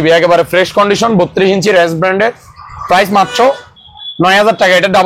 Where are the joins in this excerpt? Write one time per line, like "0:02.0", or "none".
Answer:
none